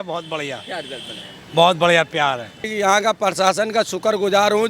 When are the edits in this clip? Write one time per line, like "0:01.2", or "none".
0:02.6

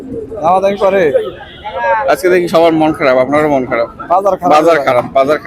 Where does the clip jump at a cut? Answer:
none

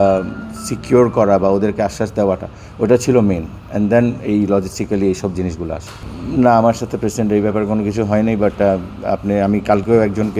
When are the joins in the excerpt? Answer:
none

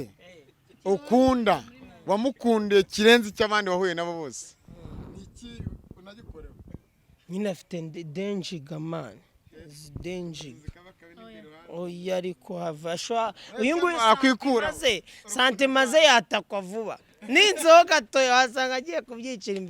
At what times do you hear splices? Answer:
none

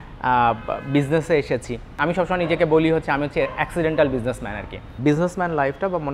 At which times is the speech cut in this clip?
0:01.9
0:04.9

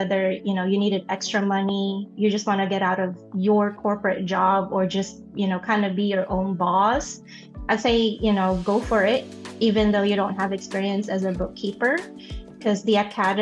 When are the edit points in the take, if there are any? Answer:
none

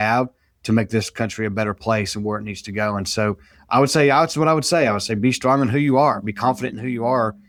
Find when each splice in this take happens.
none

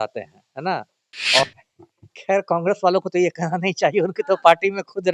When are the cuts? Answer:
0:01.4

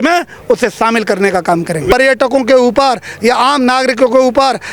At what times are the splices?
0:01.9

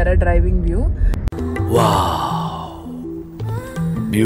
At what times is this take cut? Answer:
none

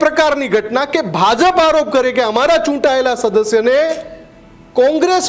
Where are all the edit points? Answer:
none

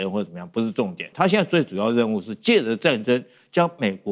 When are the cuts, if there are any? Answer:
0:01.0

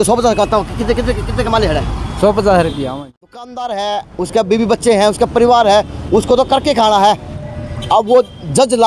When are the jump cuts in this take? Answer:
0:03.0

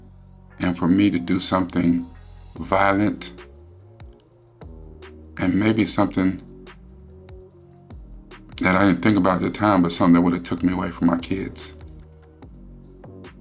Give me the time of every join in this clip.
0:06.4
0:07.8
0:12.0

